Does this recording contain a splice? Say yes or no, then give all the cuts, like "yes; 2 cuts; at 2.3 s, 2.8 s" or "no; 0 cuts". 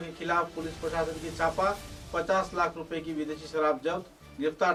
no; 0 cuts